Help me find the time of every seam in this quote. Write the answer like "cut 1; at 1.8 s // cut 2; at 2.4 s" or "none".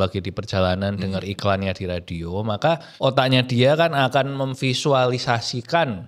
cut 1; at 2.9 s

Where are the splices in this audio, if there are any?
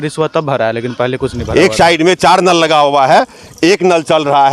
cut 1; at 1.4 s

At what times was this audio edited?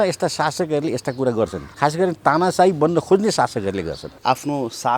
cut 1; at 1.6 s // cut 2; at 4.1 s

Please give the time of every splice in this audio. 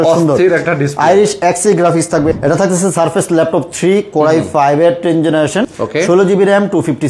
cut 1; at 2.3 s // cut 2; at 5.8 s

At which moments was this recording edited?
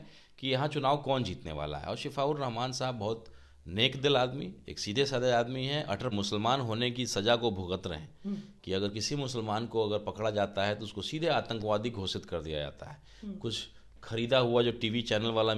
cut 1; at 6.1 s

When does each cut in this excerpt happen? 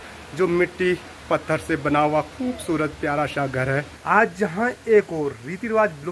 cut 1; at 3.9 s

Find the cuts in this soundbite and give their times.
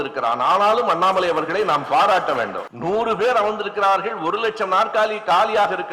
cut 1; at 2.7 s

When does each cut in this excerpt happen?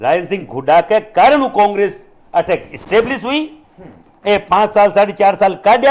none

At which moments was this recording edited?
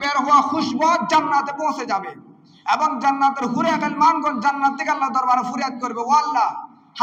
none

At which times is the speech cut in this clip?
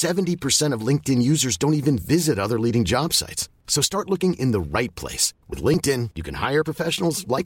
none

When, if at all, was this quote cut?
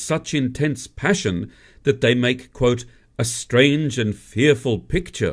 cut 1; at 1.2 s

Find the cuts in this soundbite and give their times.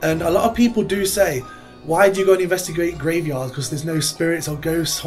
none

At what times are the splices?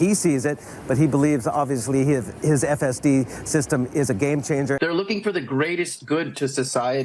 cut 1; at 4.8 s

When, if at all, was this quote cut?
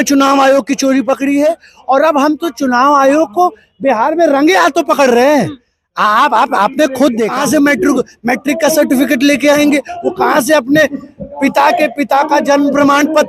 cut 1; at 7.3 s

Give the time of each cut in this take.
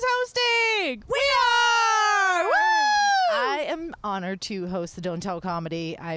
cut 1; at 1.0 s

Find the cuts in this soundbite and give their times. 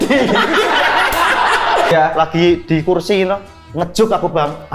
cut 1; at 1.9 s

